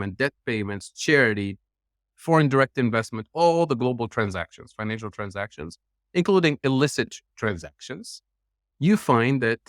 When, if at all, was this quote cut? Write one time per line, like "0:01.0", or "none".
0:08.6